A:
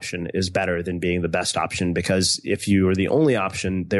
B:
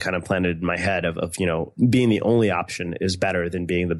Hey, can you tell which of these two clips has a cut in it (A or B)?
B